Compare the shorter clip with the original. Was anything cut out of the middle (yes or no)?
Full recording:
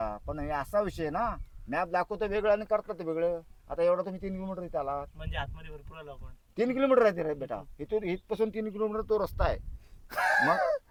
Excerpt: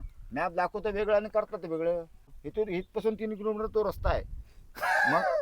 yes